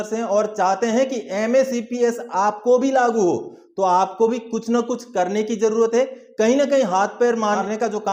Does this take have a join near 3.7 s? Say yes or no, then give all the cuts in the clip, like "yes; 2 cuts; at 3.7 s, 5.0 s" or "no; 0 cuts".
no; 0 cuts